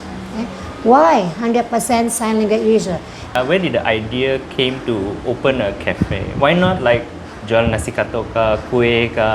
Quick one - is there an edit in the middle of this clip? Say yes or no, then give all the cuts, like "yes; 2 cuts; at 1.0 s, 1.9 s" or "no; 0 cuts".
yes; 1 cut; at 3.2 s